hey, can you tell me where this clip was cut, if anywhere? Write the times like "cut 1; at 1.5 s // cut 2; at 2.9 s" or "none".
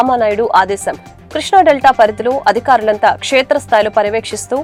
none